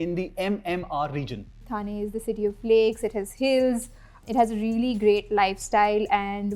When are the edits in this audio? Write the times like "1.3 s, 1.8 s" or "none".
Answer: 1.6 s, 4.2 s